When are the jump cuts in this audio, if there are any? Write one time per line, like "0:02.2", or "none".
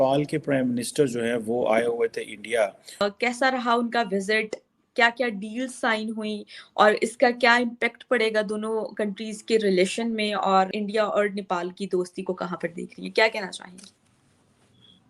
0:02.8
0:10.7